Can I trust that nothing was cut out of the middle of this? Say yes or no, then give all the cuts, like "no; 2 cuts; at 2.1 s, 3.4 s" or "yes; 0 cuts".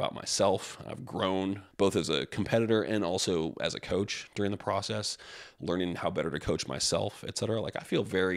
no; 1 cut; at 1.7 s